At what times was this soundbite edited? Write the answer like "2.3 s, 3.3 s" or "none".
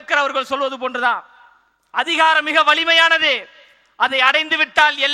none